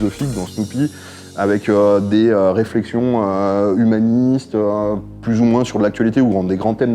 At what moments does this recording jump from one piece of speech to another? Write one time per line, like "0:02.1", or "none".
none